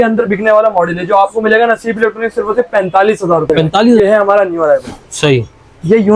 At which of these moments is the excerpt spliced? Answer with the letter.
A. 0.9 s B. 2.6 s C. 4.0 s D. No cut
C